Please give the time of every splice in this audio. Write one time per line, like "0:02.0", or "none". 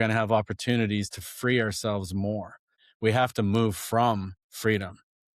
0:02.8
0:04.4

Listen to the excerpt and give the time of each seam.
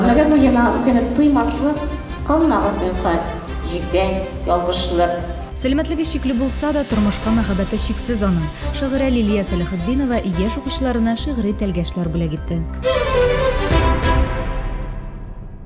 0:12.7

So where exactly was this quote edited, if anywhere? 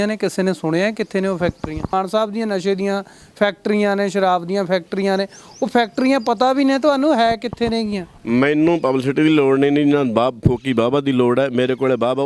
0:01.9

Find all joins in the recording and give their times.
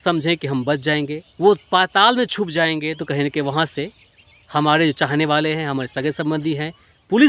0:01.2

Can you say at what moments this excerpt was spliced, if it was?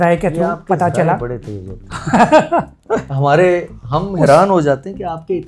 none

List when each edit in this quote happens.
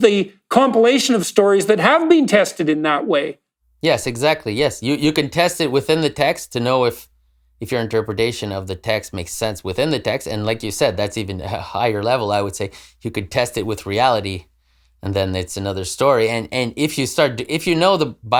none

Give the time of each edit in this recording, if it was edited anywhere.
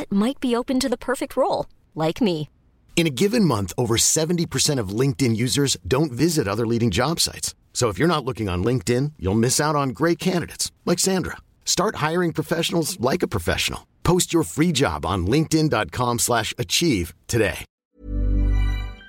0:17.7

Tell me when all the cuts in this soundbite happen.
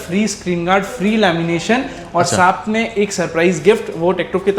none

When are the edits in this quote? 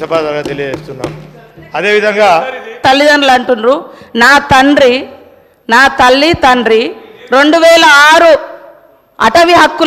0:02.8

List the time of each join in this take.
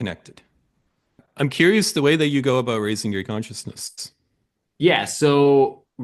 0:01.2

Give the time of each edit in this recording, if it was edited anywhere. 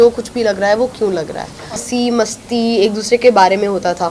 0:01.8

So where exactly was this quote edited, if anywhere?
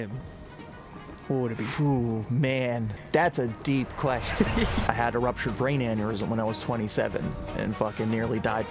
0:03.0
0:04.8

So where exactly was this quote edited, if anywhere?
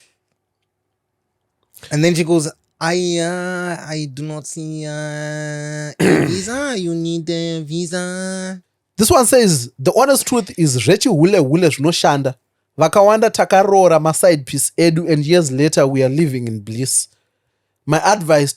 0:08.8

